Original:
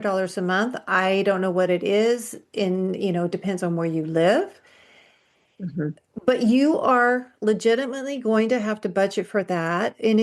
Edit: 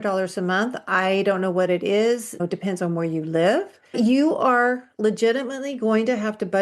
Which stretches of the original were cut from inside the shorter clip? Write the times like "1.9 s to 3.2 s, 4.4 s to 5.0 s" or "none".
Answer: 2.4 s to 3.2 s, 4.8 s to 6.4 s